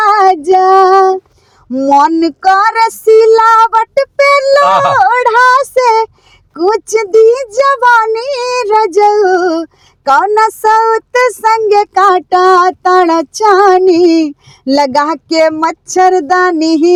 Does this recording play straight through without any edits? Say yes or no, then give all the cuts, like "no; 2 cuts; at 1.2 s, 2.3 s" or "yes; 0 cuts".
yes; 0 cuts